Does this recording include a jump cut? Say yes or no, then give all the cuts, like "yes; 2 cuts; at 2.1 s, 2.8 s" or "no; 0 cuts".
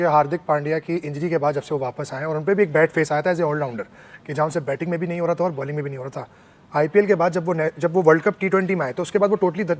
no; 0 cuts